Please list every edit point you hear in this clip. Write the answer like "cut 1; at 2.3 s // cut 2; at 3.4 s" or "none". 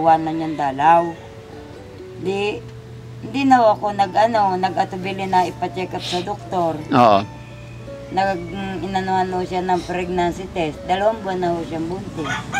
none